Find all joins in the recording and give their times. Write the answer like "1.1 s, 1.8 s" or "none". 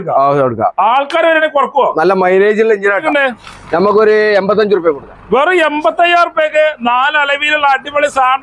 3.0 s